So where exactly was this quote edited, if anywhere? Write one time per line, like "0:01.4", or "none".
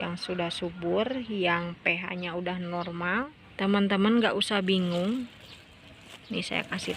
0:03.4